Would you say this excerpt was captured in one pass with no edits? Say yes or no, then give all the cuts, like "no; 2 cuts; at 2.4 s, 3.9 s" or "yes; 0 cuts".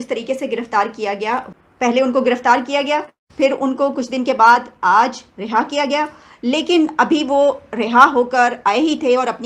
no; 1 cut; at 1.5 s